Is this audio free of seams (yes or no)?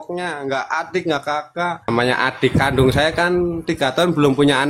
no